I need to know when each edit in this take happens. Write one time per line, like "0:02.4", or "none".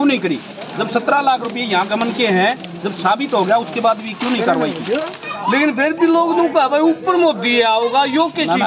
0:05.3

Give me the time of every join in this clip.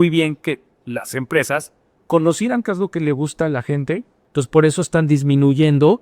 0:04.1

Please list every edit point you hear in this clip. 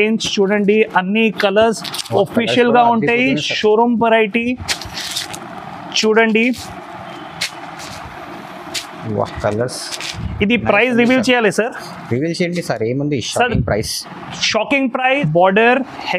0:15.2

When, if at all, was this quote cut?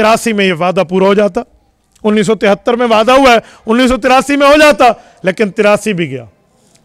none

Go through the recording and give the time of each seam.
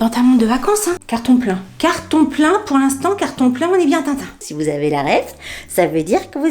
0:01.0
0:04.3

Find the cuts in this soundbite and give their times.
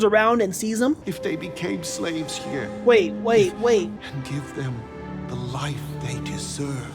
0:01.1
0:04.0

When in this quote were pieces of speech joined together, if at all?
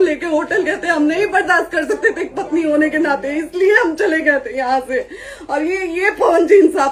none

